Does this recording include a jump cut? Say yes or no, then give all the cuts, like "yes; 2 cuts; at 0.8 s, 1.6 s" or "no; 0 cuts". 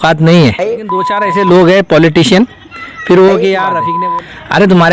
yes; 2 cuts; at 1.2 s, 3.8 s